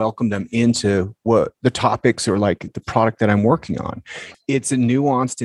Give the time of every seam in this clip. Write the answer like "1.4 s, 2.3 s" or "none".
1.5 s, 2.7 s, 4.3 s